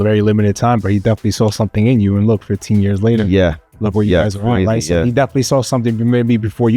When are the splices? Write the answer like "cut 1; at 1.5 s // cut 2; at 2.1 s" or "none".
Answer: none

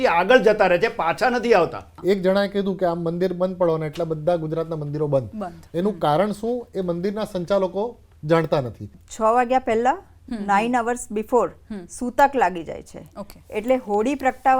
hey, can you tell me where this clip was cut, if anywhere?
cut 1; at 1.9 s // cut 2; at 9.0 s

